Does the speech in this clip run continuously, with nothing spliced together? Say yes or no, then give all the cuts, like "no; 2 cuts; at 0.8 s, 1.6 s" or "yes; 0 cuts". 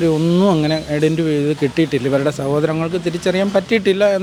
yes; 0 cuts